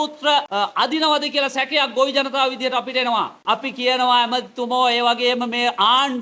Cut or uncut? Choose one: cut